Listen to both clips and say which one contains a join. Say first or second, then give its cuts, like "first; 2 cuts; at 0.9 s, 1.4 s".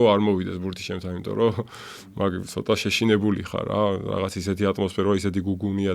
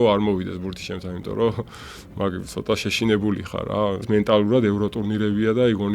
second; 1 cut; at 4.1 s